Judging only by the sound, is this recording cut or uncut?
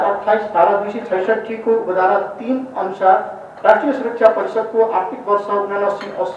uncut